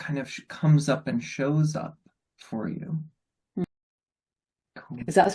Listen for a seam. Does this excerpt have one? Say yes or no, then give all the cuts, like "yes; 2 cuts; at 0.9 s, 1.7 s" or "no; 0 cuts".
yes; 1 cut; at 3.6 s